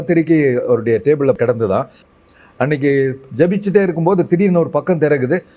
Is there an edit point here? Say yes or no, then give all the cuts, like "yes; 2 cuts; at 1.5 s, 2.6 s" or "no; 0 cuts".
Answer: yes; 1 cut; at 2.0 s